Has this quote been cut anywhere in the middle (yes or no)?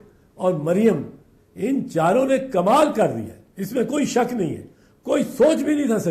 no